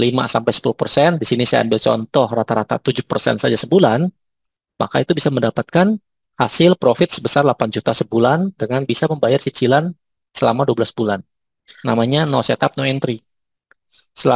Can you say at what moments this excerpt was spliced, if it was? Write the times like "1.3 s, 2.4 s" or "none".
11.7 s